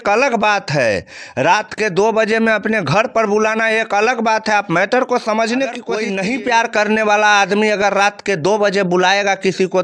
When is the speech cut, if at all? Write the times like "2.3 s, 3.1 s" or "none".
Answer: 5.9 s